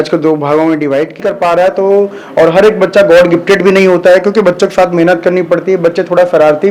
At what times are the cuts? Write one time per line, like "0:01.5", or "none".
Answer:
0:01.2